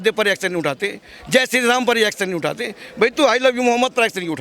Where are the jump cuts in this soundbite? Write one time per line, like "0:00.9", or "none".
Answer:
none

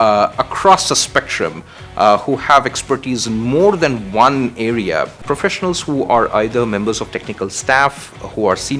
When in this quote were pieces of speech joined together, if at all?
0:05.2

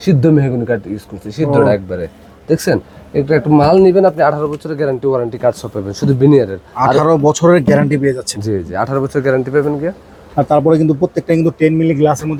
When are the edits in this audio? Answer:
none

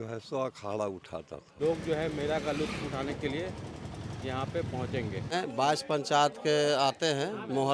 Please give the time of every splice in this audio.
0:01.4
0:05.3

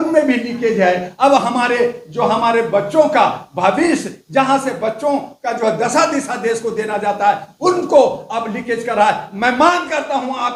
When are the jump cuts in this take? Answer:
none

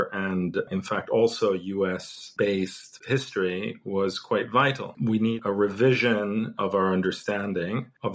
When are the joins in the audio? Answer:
0:02.2
0:02.9
0:04.9

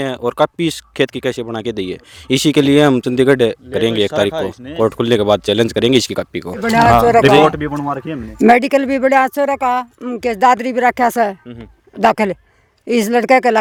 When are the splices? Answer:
none

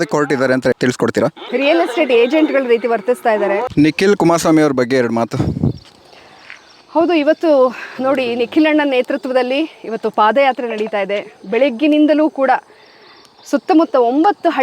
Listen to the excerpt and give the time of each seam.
0:00.9
0:03.7

